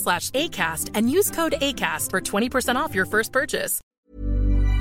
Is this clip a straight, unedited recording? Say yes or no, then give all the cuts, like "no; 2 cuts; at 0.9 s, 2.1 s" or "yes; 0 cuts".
no; 1 cut; at 3.8 s